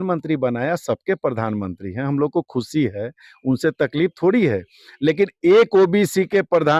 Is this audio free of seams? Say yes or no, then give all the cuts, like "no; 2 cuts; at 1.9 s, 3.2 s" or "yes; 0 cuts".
yes; 0 cuts